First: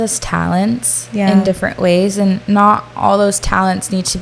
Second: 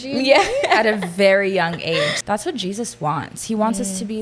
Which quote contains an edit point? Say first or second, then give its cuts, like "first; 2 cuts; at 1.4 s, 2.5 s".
second; 1 cut; at 2.2 s